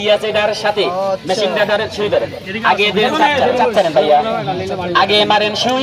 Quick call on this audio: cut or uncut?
cut